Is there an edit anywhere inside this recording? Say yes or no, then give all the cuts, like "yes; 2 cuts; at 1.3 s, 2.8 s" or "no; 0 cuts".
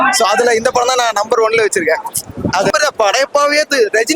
yes; 1 cut; at 2.7 s